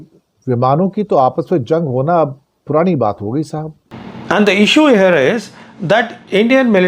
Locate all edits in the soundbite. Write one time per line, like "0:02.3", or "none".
0:03.8